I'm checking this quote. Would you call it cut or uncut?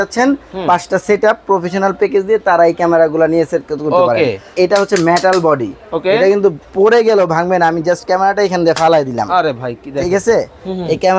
cut